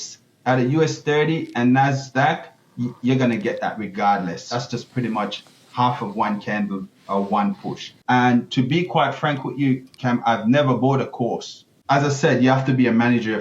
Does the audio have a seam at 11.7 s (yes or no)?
yes